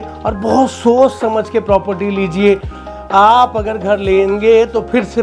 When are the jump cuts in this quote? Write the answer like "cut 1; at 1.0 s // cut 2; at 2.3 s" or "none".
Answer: cut 1; at 2.8 s